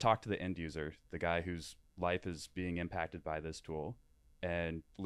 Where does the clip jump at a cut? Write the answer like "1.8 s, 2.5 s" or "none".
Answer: none